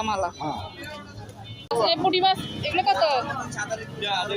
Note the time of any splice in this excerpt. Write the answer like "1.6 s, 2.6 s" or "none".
1.7 s